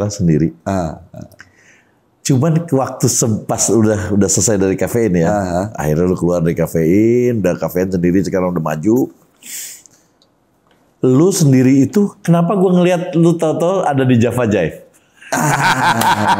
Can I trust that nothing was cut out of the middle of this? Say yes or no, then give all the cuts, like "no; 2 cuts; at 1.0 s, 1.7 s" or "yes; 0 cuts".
yes; 0 cuts